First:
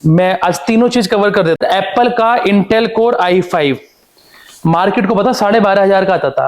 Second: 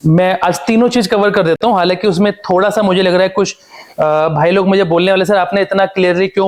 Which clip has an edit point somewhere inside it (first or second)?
first